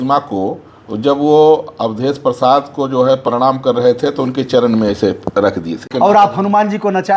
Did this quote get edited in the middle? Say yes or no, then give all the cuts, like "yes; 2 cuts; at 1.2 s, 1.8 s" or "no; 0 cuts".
yes; 1 cut; at 5.9 s